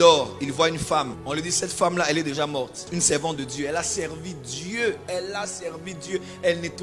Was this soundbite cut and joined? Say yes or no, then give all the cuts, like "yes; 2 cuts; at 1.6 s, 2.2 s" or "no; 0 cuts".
yes; 2 cuts; at 1.2 s, 2.9 s